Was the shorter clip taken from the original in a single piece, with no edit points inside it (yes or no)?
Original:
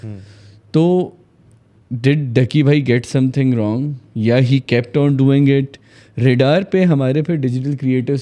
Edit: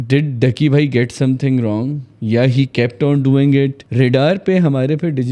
no